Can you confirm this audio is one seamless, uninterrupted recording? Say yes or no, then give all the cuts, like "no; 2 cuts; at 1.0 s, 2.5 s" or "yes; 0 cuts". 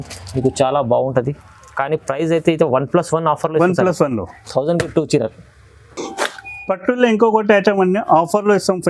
yes; 0 cuts